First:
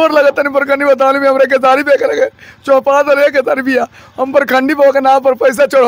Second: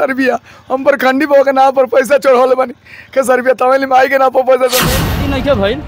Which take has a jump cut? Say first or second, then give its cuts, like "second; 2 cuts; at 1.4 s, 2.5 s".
second; 1 cut; at 4.8 s